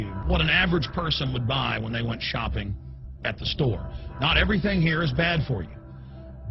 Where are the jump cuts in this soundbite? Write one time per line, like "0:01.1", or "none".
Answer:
none